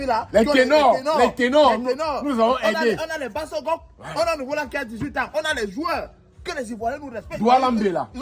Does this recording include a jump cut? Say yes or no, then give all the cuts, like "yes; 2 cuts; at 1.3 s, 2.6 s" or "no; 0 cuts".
no; 0 cuts